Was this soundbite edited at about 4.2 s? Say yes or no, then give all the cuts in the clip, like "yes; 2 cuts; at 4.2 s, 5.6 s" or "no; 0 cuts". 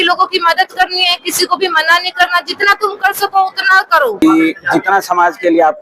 yes; 1 cut; at 4.2 s